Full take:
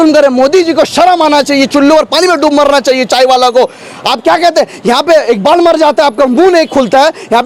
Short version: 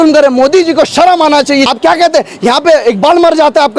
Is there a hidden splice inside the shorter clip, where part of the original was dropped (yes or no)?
yes